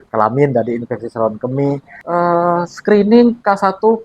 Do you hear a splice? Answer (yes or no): yes